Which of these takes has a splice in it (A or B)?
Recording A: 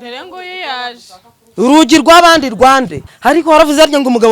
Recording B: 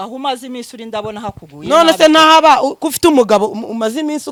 A